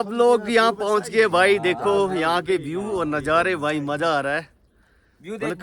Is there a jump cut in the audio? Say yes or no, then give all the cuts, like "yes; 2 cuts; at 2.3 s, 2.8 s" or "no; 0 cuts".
no; 0 cuts